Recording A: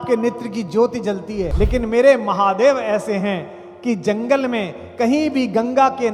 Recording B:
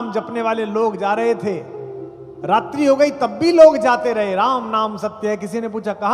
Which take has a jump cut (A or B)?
A